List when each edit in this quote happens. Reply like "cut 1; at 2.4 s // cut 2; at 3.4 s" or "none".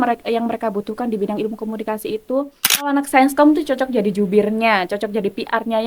cut 1; at 2.9 s